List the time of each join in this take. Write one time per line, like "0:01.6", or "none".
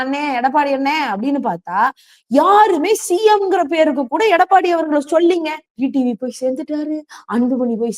0:05.6